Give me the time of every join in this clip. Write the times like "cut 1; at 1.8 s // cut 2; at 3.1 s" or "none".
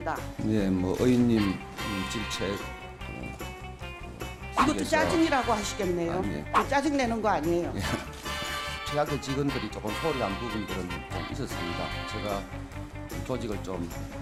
none